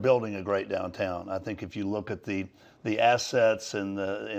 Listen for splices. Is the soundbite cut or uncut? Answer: uncut